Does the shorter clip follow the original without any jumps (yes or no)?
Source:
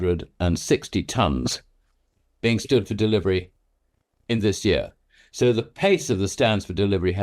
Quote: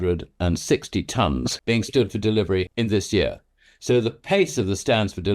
no